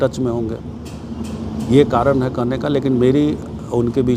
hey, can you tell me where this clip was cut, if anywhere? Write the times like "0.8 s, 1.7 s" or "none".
none

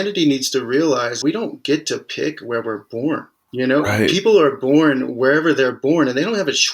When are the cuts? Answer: 1.2 s

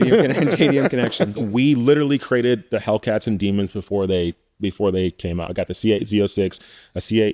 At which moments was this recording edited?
1.3 s, 5.5 s

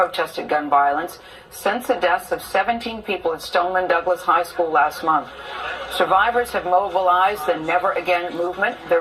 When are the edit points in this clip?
2.0 s

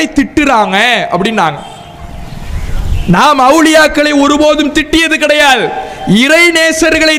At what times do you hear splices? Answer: none

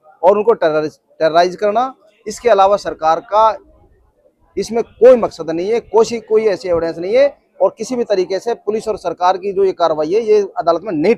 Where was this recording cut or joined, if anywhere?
none

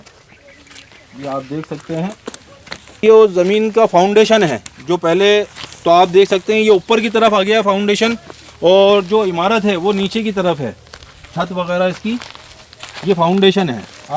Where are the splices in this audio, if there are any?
3.0 s

